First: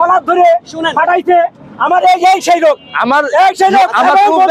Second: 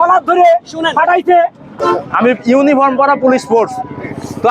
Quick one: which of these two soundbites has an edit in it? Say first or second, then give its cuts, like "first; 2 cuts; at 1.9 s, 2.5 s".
second; 1 cut; at 1.7 s